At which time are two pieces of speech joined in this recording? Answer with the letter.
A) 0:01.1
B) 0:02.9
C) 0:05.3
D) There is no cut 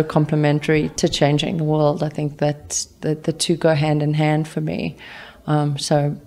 D